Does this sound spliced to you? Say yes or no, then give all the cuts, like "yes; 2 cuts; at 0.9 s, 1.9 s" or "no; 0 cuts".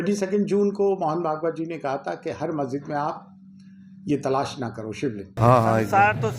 yes; 1 cut; at 5.3 s